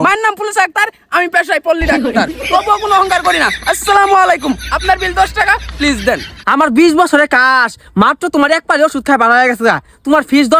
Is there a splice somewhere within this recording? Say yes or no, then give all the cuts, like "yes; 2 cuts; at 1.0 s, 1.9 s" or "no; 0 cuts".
no; 0 cuts